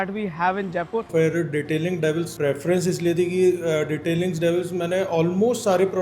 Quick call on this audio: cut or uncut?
cut